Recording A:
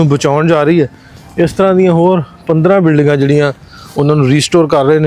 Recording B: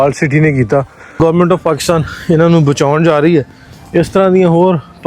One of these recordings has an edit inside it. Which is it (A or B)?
B